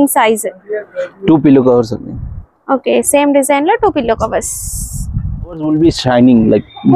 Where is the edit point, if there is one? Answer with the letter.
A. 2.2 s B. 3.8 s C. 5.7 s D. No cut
C